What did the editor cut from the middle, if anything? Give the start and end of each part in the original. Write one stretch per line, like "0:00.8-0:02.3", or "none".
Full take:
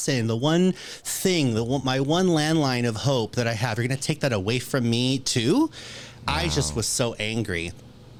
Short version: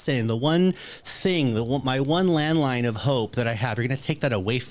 none